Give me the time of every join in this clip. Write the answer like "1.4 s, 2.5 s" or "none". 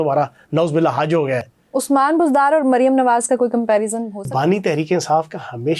1.6 s, 4.3 s